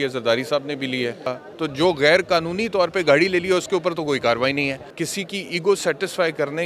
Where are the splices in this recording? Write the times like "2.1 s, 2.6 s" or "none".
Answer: 1.4 s, 4.9 s